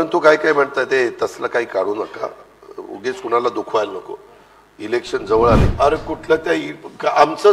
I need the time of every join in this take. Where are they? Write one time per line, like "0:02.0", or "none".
0:05.7